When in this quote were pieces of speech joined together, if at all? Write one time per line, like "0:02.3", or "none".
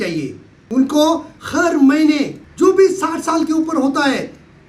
0:01.4
0:02.4